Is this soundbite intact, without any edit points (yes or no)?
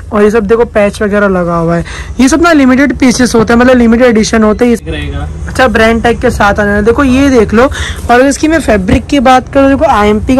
no